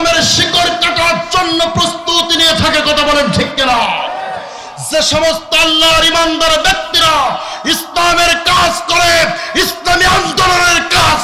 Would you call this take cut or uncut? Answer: uncut